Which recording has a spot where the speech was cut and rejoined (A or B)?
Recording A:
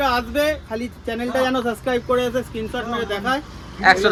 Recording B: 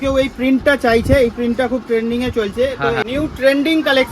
B